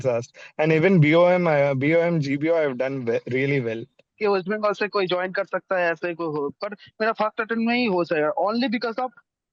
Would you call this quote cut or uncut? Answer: cut